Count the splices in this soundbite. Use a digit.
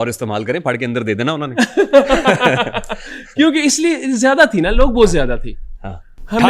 0